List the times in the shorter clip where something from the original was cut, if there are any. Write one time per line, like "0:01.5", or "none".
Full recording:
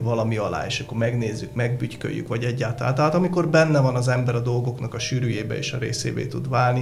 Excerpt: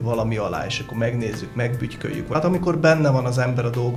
0:02.4